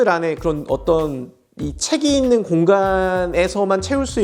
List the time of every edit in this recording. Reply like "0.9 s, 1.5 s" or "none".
none

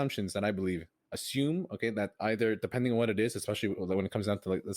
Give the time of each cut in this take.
1.0 s

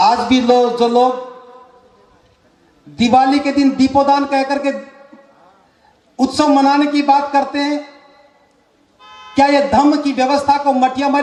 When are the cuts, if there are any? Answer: none

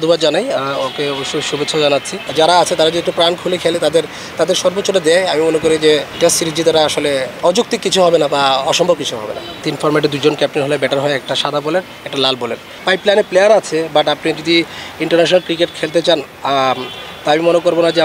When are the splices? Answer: 2.2 s, 6.1 s, 7.3 s, 9.6 s, 12.8 s

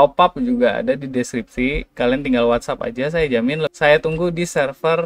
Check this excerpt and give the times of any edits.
3.7 s

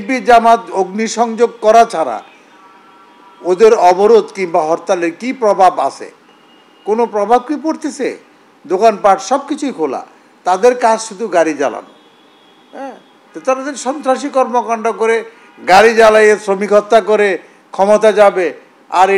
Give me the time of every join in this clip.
none

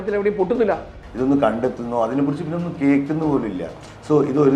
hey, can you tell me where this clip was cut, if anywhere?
1.0 s

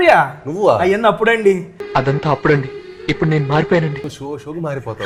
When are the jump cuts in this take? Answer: none

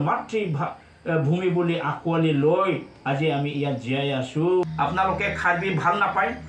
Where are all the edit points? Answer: 4.6 s

